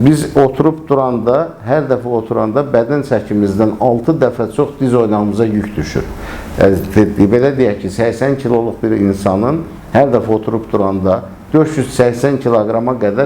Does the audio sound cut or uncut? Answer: uncut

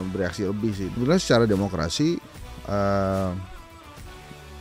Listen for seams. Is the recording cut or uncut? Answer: cut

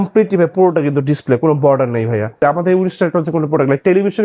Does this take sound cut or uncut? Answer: cut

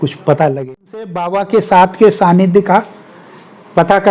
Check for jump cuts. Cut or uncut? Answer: cut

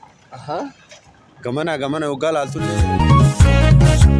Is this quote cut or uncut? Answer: cut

